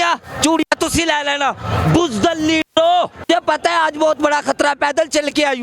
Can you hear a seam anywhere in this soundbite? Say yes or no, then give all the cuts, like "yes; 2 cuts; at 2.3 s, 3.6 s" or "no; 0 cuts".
yes; 1 cut; at 3.2 s